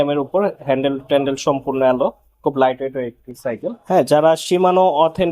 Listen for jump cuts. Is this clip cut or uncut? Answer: cut